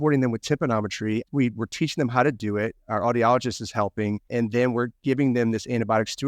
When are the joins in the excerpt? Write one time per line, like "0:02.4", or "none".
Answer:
0:01.3
0:04.2

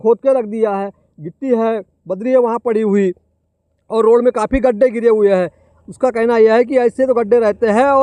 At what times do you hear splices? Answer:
none

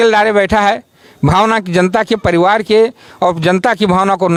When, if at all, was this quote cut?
none

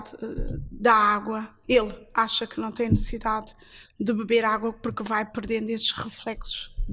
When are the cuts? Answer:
none

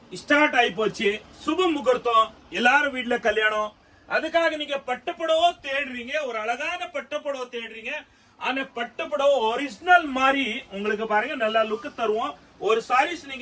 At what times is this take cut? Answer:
none

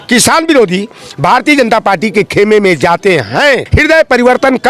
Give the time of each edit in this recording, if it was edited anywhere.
0:03.7

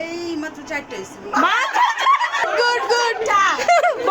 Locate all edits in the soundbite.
0:02.4

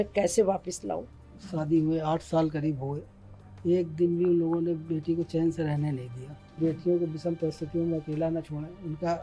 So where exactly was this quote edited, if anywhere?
0:01.4
0:06.6

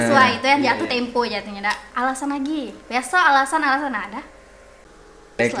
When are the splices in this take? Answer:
0:01.9
0:02.8

